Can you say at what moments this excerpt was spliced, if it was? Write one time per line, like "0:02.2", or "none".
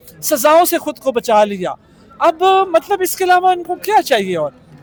none